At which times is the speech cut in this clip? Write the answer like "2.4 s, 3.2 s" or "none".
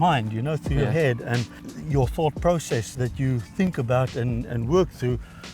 1.6 s, 2.9 s

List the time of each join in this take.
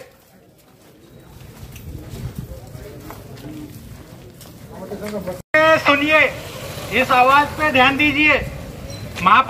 5.5 s

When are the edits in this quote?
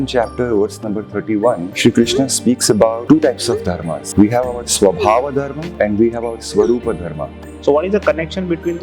1.7 s, 3.0 s, 3.9 s, 5.6 s, 7.5 s

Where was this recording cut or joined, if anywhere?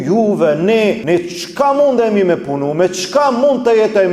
1.0 s

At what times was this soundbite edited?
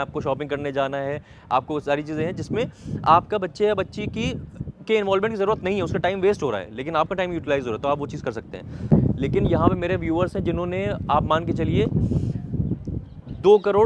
8.9 s

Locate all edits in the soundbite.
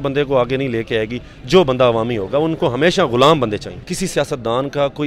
3.8 s

